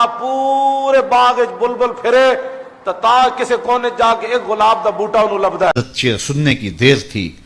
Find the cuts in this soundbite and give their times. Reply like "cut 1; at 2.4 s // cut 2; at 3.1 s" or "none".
cut 1; at 5.9 s